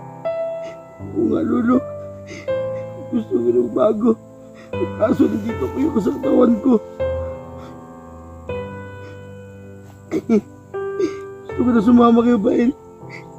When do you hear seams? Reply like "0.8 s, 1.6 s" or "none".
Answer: 1.0 s, 6.8 s, 8.7 s, 9.9 s